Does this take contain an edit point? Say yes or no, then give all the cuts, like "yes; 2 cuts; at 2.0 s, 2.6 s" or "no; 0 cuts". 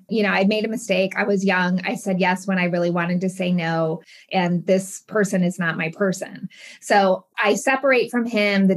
yes; 2 cuts; at 4.2 s, 7.3 s